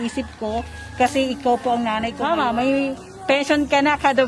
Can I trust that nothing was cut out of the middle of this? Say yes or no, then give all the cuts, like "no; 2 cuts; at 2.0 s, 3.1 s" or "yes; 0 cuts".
no; 1 cut; at 2.1 s